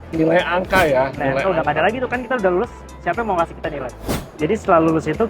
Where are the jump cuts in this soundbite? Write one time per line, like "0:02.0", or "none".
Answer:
0:04.0